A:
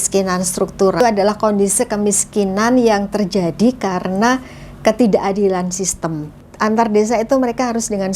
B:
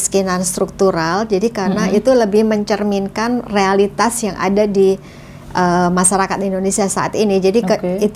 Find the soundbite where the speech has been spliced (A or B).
A